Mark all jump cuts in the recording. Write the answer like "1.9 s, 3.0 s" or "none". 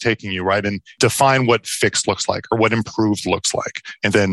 0.9 s